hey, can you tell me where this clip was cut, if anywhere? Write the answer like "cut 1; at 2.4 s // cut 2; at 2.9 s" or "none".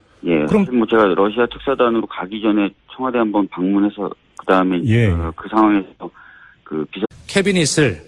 none